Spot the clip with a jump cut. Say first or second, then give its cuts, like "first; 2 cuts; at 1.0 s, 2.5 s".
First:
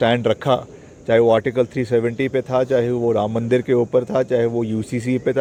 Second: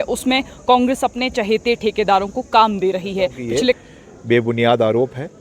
second; 1 cut; at 3.8 s